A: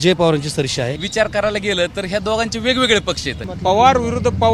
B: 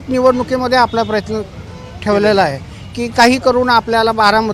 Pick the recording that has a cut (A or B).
A